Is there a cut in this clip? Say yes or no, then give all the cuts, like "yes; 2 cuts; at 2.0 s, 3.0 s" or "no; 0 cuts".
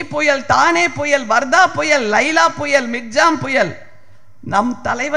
no; 0 cuts